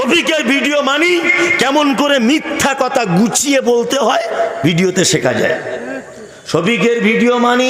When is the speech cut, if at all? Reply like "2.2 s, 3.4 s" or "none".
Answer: none